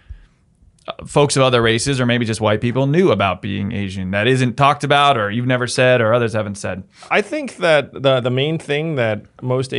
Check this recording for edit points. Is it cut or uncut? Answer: cut